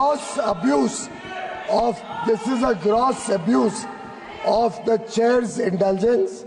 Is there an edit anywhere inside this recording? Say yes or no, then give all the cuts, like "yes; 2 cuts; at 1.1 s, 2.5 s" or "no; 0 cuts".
no; 0 cuts